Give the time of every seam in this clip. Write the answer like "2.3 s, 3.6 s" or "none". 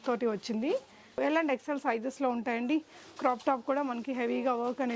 1.2 s